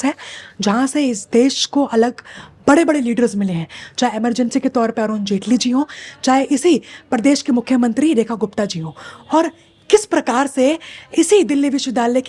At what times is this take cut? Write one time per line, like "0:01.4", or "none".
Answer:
none